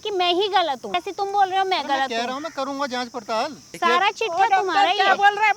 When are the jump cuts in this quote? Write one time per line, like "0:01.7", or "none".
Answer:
0:01.0
0:03.6

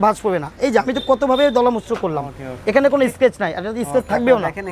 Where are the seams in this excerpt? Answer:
none

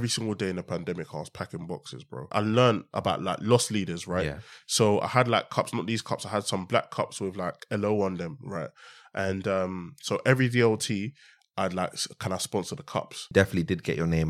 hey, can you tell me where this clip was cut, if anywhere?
0:02.3
0:13.3

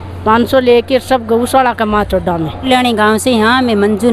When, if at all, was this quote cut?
0:02.7

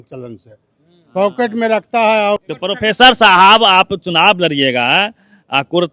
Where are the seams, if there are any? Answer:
0:02.5

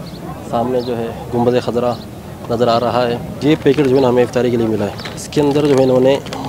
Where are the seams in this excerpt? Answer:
0:03.4
0:05.2

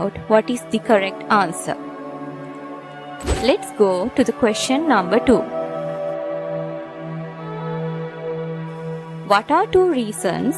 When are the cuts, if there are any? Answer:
0:03.3

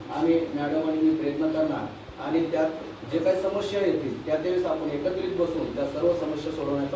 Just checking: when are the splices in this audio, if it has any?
none

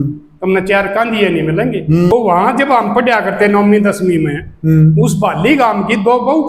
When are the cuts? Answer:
0:02.1

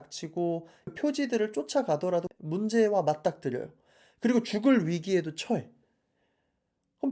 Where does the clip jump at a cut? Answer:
0:00.9

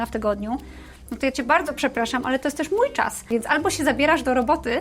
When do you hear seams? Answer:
0:03.2

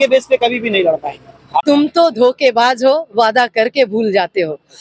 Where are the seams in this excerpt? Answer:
0:01.6

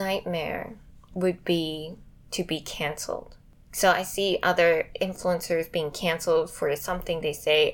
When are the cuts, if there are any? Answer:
none

